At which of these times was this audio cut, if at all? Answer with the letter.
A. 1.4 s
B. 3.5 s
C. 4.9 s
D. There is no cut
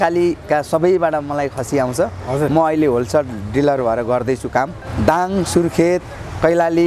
C